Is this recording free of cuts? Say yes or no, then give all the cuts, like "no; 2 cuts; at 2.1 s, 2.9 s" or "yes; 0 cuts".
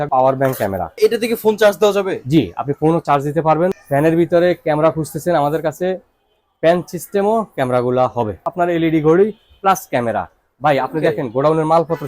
no; 3 cuts; at 0.9 s, 3.8 s, 8.5 s